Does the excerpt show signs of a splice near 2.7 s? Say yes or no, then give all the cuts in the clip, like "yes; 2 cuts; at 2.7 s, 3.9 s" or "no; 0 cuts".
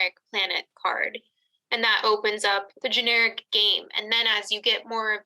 yes; 1 cut; at 2.7 s